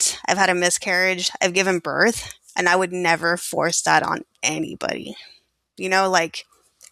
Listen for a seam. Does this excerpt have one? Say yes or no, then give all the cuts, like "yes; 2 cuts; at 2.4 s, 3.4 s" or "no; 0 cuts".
no; 0 cuts